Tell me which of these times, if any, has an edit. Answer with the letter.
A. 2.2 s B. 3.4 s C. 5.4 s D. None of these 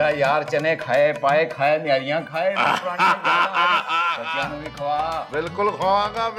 D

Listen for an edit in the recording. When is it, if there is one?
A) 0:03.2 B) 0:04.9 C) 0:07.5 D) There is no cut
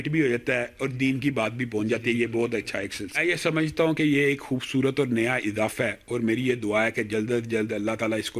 A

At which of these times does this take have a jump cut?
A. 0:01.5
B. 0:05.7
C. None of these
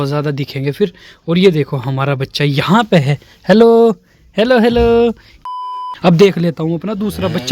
B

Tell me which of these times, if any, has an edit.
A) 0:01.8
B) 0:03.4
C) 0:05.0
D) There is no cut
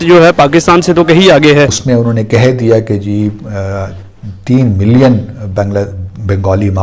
A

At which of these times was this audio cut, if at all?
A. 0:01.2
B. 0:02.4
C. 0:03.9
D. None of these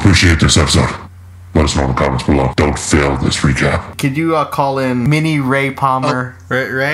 C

